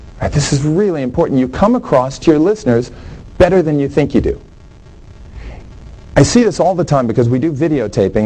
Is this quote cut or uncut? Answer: uncut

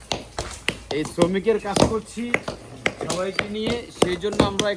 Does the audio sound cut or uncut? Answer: uncut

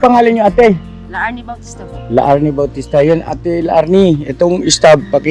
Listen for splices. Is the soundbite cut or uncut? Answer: uncut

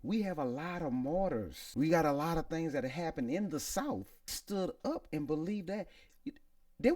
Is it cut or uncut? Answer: cut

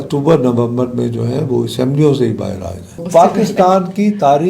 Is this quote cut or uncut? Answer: cut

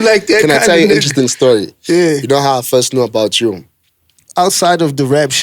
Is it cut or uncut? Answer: cut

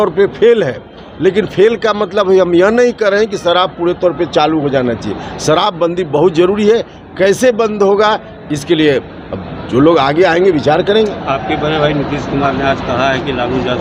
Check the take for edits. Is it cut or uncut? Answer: uncut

